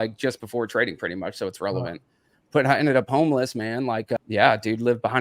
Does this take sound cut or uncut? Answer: cut